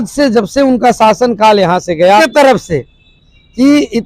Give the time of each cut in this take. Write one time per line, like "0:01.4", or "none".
0:02.2